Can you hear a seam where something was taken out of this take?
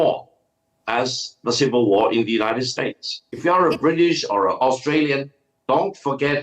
yes; 1 cut; at 3.3 s

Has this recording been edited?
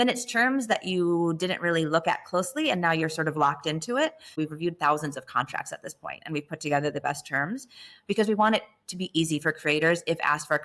yes; 1 cut; at 4.4 s

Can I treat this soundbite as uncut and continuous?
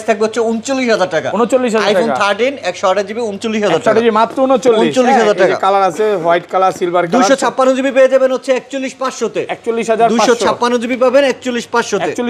yes; 0 cuts

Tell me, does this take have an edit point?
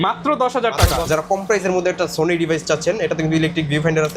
yes; 1 cut; at 1.1 s

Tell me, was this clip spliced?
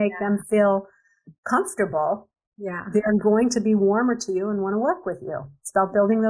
no; 0 cuts

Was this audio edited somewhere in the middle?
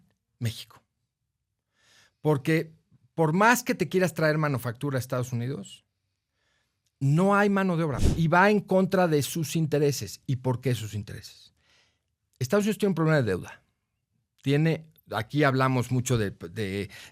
yes; 1 cut; at 8.0 s

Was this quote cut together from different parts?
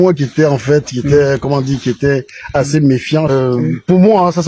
yes; 1 cut; at 3.3 s

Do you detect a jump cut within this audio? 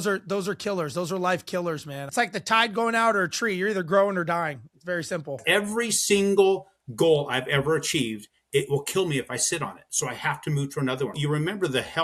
yes; 3 cuts; at 2.0 s, 5.4 s, 11.2 s

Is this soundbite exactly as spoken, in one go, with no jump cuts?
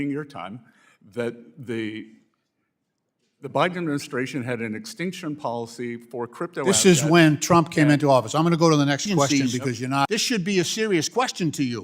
no; 1 cut; at 10.1 s

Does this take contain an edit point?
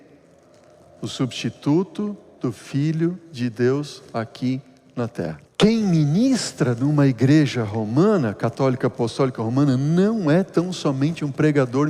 yes; 1 cut; at 5.4 s

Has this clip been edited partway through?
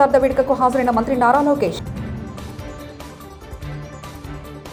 no; 0 cuts

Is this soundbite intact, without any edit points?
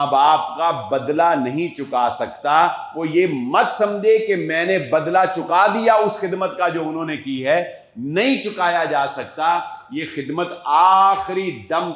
yes; 0 cuts

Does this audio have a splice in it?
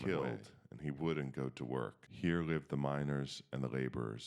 yes; 1 cut; at 2.0 s

